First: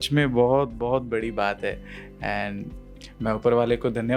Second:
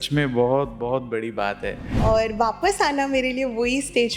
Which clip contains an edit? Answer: second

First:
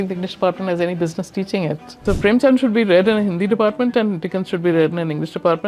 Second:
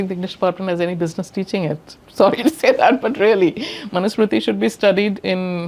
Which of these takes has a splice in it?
first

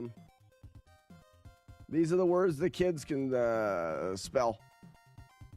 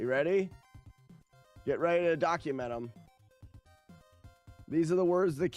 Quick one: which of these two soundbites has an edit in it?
first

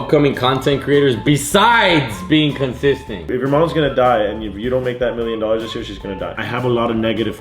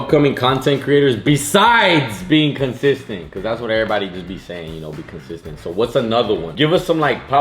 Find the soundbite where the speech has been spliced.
first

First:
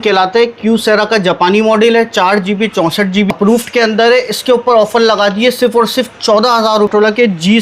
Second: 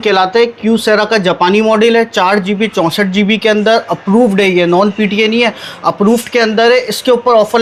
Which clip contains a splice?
first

